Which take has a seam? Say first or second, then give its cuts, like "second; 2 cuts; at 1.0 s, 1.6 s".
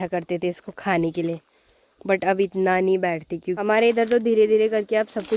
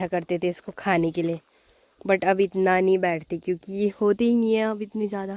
first; 1 cut; at 3.5 s